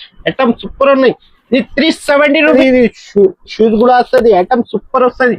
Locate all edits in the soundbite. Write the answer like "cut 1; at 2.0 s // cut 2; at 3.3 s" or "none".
cut 1; at 2.5 s